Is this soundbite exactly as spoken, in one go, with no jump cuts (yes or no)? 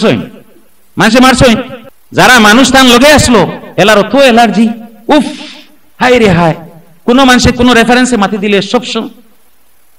no